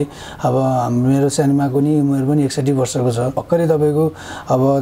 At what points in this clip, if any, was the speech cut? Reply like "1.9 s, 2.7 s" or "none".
3.4 s